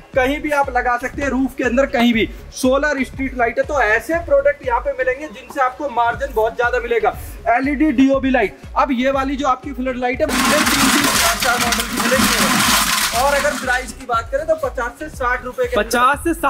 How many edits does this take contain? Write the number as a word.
one